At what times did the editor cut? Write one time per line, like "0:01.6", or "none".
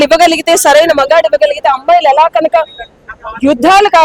none